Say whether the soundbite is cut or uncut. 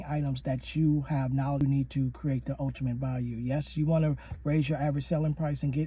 cut